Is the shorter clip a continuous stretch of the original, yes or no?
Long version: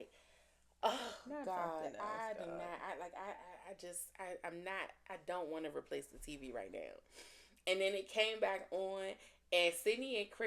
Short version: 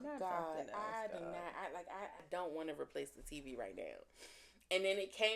no